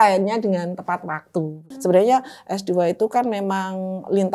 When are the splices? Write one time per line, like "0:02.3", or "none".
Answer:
0:01.7